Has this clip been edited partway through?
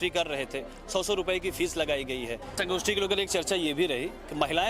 yes; 1 cut; at 2.6 s

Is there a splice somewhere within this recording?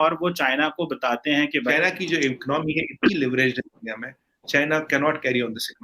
yes; 1 cut; at 1.7 s

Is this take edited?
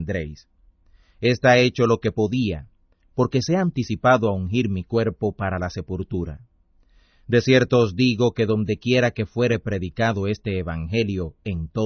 yes; 1 cut; at 5.0 s

